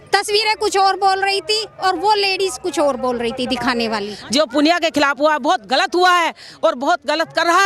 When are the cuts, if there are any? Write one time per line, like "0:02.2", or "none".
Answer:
0:04.2